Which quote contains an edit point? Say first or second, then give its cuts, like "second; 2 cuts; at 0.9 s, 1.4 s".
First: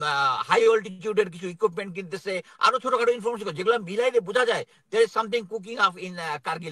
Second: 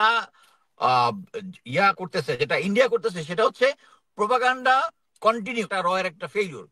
second; 1 cut; at 5.7 s